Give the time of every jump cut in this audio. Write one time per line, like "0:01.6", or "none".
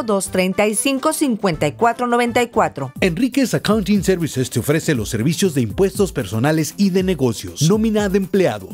0:02.8